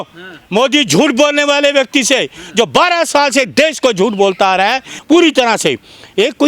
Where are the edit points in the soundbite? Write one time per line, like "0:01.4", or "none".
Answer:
0:04.9

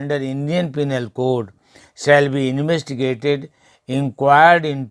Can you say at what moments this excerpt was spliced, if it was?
none

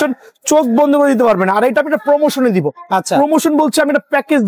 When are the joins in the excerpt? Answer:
none

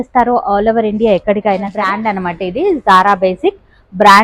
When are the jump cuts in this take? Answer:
0:01.8

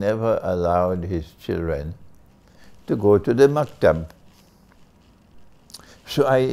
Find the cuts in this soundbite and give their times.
none

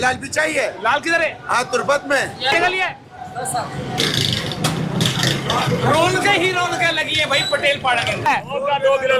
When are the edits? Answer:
0:02.5
0:04.0
0:08.3

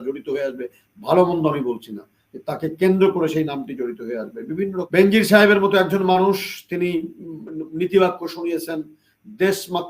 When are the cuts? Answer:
0:04.9

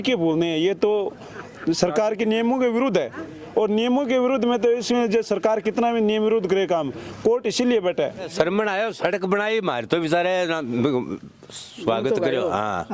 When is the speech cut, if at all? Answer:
0:08.3

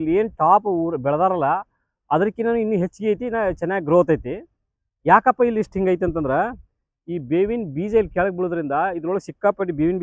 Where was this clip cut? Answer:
none

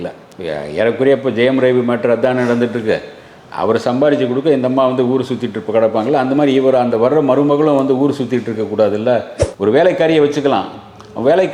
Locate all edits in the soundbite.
0:09.4

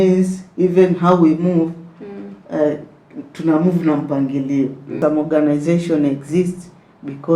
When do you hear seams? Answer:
0:04.8

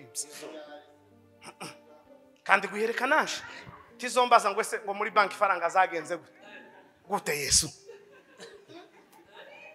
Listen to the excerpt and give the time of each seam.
none

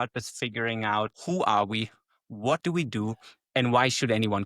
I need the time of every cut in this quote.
0:01.1

